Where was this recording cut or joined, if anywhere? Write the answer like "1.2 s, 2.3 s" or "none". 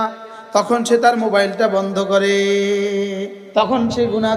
3.4 s